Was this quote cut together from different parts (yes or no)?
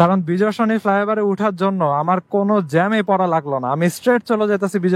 no